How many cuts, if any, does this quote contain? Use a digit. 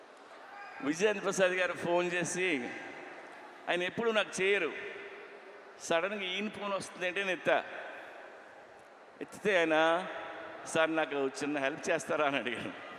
0